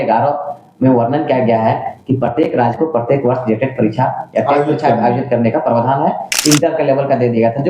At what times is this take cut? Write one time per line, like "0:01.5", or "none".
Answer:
0:06.3